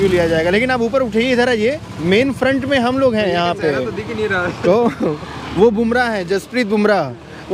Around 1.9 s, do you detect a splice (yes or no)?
no